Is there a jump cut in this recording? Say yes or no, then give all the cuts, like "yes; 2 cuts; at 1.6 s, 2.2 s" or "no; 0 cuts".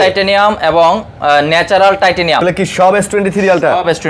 yes; 1 cut; at 2.4 s